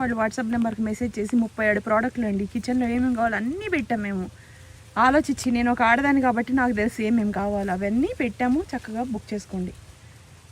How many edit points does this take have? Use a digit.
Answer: 0